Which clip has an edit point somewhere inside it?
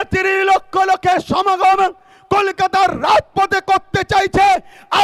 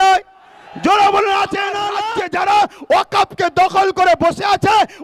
second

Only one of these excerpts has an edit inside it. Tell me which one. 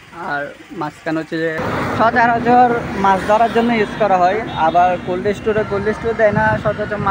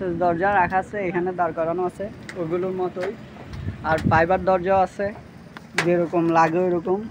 first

